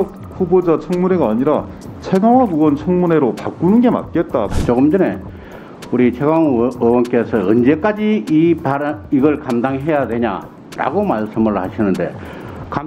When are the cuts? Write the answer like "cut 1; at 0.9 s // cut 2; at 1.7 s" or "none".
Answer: cut 1; at 4.5 s